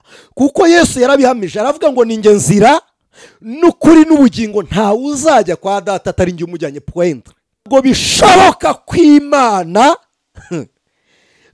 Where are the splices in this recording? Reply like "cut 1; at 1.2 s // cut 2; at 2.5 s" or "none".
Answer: cut 1; at 7.6 s